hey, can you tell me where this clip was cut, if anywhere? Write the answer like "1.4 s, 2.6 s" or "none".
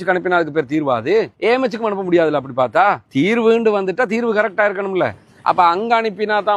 none